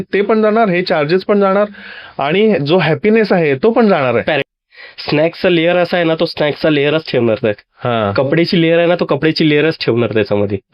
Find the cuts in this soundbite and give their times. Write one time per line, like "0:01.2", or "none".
0:04.4